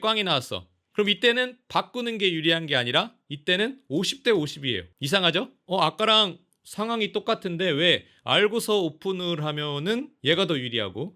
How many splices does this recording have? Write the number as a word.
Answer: two